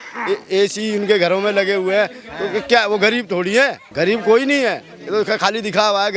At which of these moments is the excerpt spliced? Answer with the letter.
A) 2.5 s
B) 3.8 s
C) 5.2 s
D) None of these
B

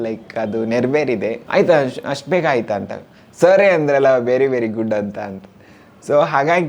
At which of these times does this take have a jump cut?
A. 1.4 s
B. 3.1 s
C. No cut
A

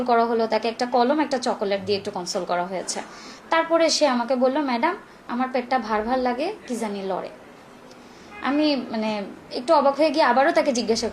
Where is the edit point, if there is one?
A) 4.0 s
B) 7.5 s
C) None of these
C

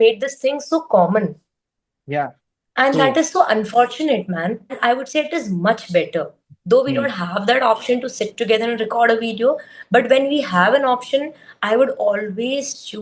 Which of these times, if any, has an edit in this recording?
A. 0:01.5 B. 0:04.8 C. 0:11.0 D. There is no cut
B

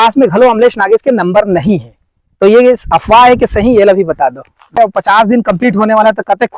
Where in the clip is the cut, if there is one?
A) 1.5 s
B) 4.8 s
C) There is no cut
B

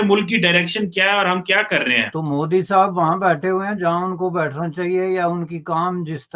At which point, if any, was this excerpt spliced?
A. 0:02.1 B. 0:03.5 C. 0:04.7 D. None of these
A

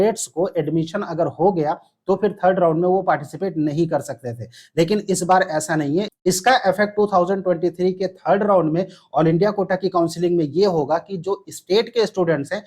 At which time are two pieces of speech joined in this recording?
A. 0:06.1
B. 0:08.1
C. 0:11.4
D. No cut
A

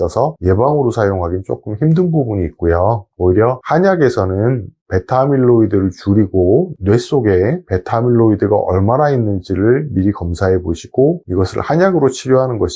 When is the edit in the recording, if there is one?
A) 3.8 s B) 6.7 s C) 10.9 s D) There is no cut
B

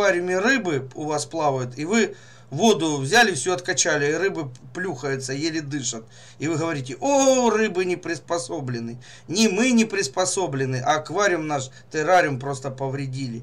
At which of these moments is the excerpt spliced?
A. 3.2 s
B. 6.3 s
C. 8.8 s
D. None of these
D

